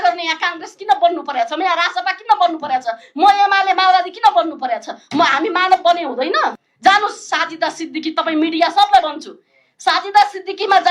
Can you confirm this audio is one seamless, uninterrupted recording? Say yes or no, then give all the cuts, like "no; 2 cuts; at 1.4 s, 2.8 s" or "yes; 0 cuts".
no; 1 cut; at 6.6 s